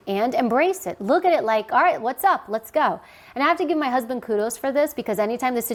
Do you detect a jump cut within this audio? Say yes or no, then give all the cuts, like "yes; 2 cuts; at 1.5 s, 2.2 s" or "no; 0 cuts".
no; 0 cuts